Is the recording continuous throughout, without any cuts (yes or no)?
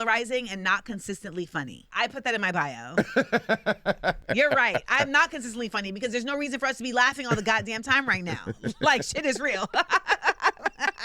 no